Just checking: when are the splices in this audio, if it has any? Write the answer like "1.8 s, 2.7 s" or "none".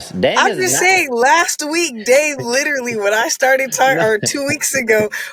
none